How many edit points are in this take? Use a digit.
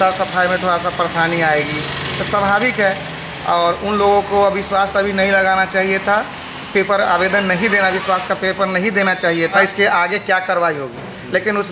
1